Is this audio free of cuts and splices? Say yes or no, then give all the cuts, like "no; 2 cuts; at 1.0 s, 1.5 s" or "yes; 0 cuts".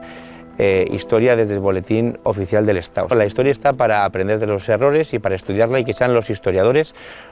no; 1 cut; at 3.1 s